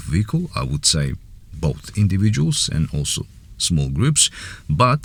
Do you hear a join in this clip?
no; 0 cuts

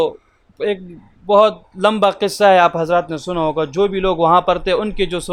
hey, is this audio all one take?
yes; 0 cuts

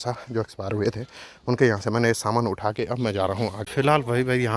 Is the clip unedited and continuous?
no; 1 cut; at 3.6 s

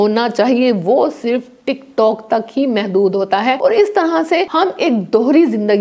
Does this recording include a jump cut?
yes; 2 cuts; at 3.6 s, 4.5 s

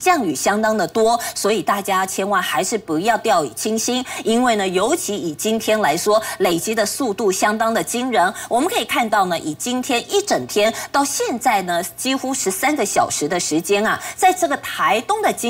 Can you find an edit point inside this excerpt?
no; 0 cuts

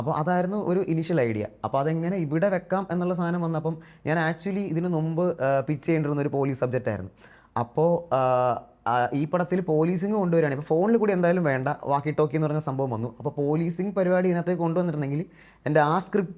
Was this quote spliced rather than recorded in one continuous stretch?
no; 0 cuts

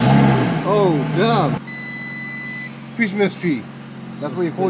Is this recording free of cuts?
no; 1 cut; at 1.6 s

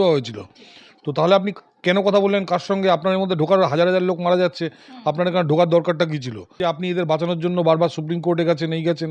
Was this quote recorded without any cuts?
no; 1 cut; at 6.6 s

